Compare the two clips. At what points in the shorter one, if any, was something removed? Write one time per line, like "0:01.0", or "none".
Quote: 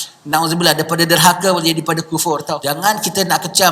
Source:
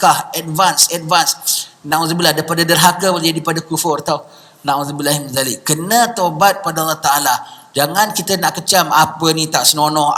0:02.5